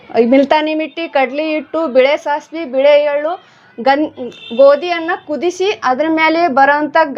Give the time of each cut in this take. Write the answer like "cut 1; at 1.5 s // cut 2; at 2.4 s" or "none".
none